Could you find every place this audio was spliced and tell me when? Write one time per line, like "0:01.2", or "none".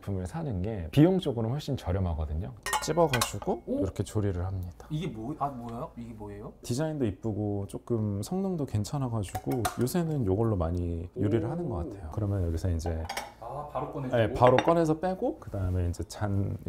0:02.6
0:06.6
0:12.0